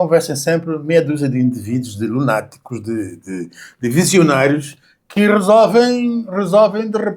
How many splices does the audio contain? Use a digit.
0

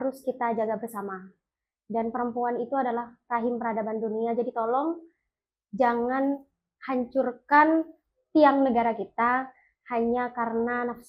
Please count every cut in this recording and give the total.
0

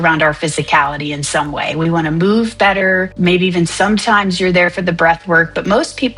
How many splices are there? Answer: 1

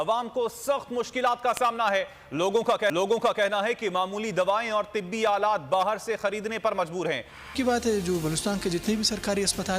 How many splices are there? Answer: 1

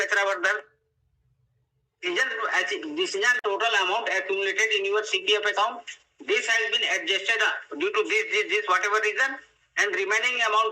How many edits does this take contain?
1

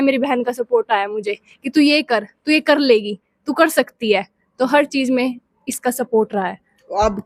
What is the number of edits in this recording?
0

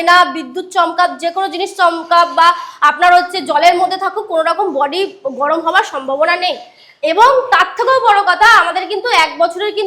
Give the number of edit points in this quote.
0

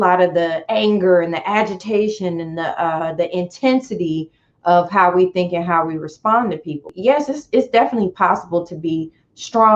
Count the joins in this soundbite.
1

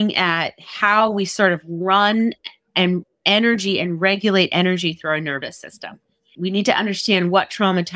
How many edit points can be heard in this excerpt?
1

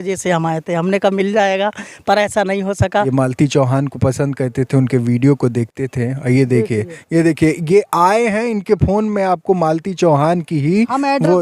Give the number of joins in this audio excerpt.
1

